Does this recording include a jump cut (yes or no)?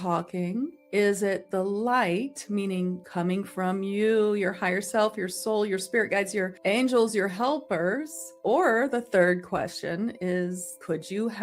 no